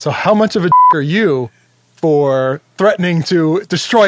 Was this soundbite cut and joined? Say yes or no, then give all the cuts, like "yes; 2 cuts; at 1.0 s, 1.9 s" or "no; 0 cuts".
no; 0 cuts